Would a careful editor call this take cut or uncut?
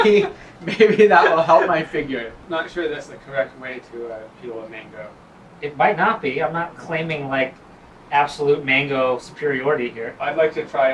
uncut